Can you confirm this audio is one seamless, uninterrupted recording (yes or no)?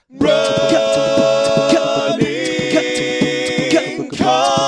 yes